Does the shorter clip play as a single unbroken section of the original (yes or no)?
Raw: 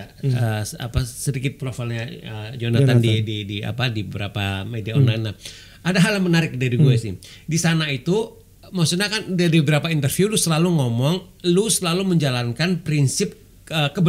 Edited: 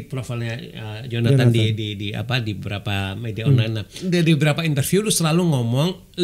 no